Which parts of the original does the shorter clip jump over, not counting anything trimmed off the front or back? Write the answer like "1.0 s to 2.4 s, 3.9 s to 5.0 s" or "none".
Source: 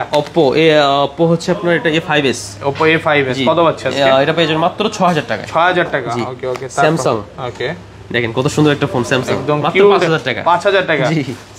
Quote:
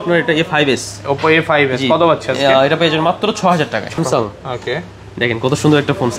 5.5 s to 6.9 s